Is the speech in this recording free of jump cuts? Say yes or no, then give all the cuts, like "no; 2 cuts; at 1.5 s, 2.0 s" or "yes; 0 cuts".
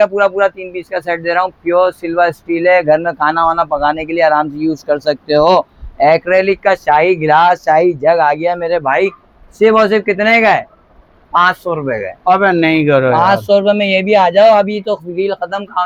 yes; 0 cuts